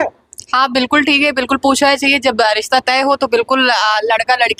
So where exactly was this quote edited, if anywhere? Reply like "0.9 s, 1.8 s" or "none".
none